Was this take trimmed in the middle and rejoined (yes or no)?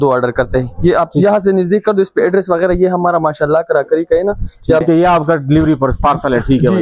yes